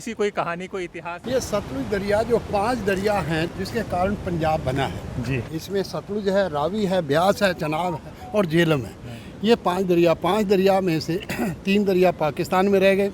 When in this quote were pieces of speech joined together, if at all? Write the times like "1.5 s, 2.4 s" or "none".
1.2 s, 3.5 s, 5.5 s